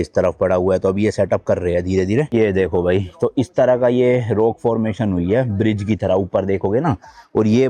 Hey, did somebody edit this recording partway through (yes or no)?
yes